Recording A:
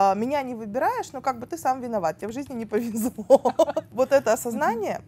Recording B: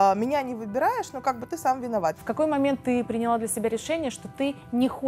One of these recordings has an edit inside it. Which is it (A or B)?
B